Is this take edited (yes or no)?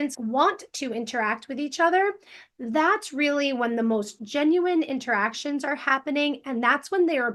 no